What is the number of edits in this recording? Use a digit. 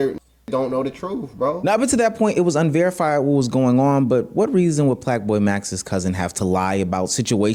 0